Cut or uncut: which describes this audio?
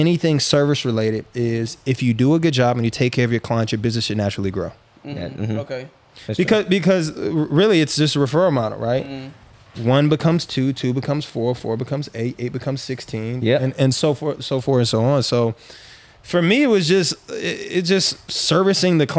uncut